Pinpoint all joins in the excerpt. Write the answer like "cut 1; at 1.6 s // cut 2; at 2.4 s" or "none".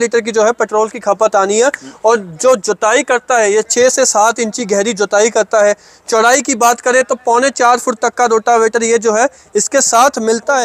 none